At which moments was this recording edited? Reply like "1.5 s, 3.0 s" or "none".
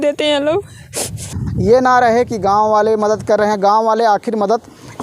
1.4 s